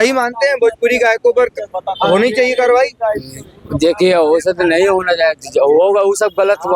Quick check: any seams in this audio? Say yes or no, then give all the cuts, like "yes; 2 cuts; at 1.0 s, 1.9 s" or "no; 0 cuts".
no; 0 cuts